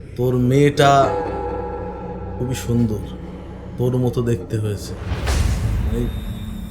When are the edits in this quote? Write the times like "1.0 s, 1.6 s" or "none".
none